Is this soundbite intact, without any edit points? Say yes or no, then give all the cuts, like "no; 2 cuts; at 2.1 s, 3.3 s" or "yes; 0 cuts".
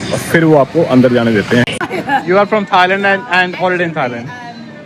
no; 1 cut; at 1.7 s